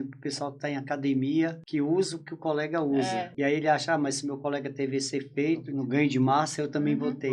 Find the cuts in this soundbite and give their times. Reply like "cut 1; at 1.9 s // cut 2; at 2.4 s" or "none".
cut 1; at 1.6 s // cut 2; at 3.3 s // cut 3; at 5.7 s